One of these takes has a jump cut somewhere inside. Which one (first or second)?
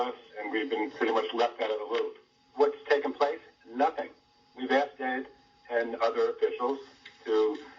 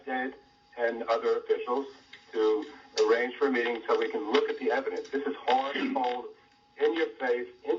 first